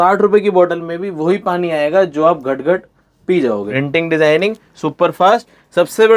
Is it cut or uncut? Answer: cut